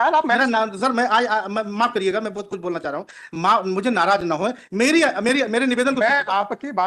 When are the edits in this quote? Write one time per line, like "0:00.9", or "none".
none